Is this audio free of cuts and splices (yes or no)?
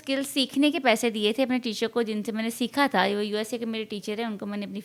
yes